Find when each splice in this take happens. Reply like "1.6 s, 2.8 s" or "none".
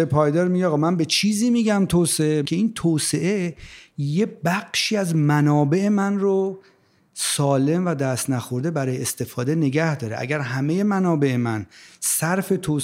2.4 s